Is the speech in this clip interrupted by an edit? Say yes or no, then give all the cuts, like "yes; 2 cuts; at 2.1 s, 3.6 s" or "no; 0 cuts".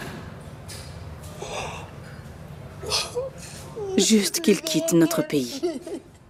no; 0 cuts